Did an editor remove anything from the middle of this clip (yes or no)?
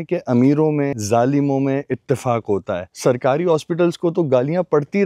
yes